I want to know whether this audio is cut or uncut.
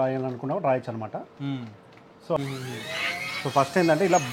cut